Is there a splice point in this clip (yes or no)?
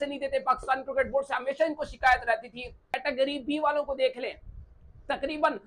yes